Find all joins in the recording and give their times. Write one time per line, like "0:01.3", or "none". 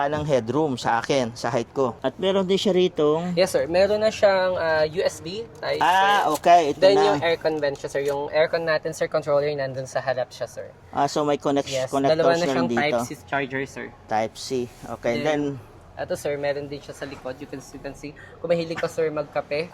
none